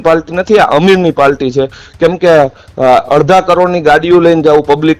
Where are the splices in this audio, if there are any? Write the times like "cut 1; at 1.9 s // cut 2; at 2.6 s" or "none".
none